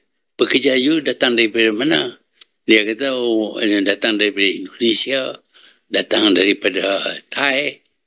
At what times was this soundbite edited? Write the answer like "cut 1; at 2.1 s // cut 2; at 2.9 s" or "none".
none